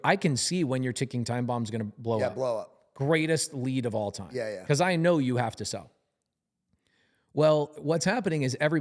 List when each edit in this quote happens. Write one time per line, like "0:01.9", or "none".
none